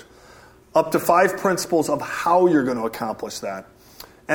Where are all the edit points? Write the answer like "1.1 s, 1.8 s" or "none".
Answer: none